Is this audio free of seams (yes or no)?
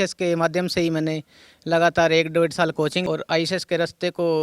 no